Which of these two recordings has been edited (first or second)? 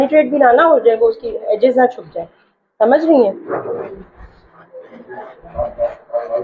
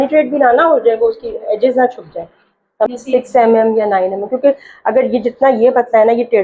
second